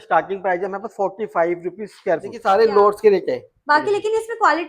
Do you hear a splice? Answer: yes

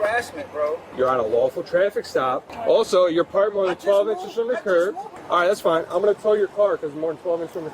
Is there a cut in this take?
yes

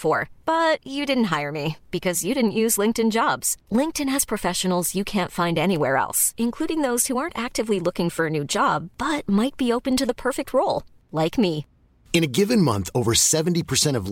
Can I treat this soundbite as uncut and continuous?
yes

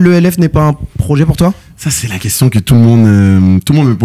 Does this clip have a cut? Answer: no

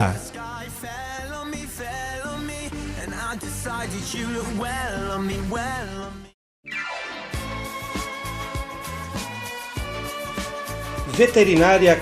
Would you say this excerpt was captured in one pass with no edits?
no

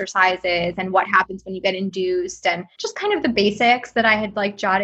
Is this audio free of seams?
no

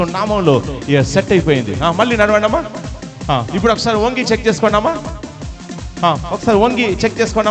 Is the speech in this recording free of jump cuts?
yes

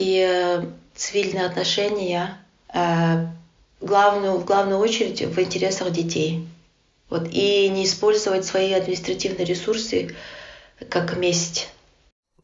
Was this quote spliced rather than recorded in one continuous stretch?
no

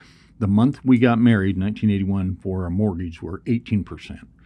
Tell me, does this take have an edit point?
no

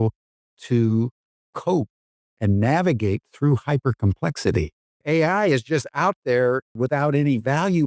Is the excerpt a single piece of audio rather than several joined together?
no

